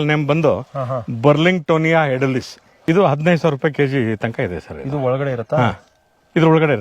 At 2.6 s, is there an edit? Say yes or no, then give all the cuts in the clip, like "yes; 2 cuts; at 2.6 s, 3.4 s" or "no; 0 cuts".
yes; 1 cut; at 2.6 s